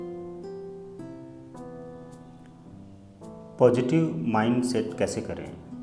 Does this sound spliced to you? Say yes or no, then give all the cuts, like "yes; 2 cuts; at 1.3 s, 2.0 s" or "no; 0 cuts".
yes; 1 cut; at 1.1 s